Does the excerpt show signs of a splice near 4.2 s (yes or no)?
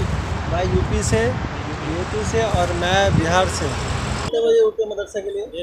yes